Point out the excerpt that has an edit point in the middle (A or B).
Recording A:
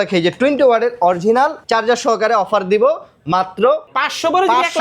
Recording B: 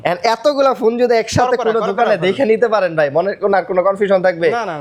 A